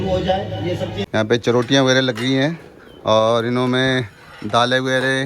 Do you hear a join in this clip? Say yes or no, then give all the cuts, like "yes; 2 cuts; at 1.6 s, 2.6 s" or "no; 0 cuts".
yes; 1 cut; at 1.0 s